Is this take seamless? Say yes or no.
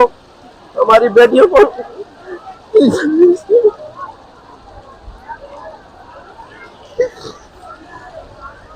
yes